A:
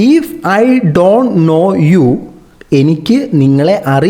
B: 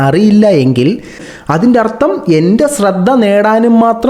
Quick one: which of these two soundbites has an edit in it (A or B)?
B